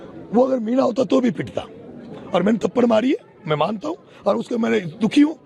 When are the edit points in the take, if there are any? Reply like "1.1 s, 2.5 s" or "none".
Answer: none

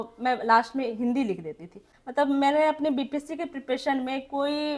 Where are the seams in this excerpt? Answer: 1.9 s

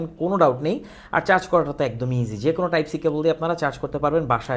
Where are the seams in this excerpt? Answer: none

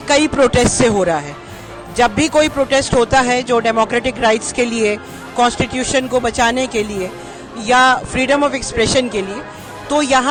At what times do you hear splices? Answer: none

